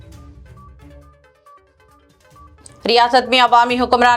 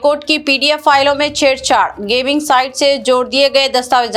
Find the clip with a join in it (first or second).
first